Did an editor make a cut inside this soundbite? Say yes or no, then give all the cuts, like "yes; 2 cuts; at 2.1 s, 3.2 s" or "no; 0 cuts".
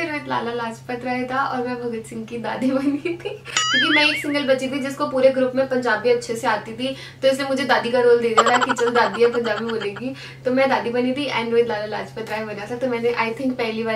no; 0 cuts